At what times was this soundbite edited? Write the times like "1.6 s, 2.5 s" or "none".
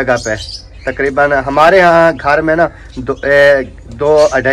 none